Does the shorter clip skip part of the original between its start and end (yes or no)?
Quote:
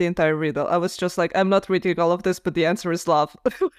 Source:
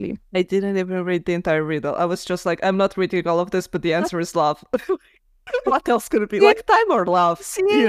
no